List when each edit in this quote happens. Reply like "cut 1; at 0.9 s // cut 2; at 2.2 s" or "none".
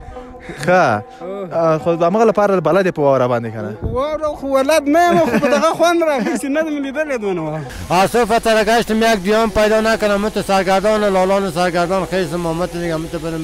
cut 1; at 7.7 s